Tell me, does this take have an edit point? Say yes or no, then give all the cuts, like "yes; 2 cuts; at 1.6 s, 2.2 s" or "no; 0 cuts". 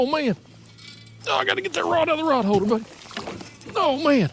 no; 0 cuts